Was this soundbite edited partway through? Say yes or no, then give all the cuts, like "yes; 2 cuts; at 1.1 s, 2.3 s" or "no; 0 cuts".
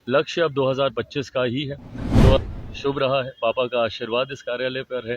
yes; 1 cut; at 2.4 s